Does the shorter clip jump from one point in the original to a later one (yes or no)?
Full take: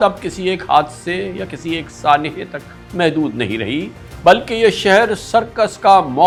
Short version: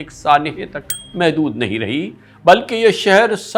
no